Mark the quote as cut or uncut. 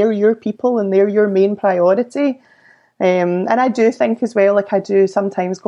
uncut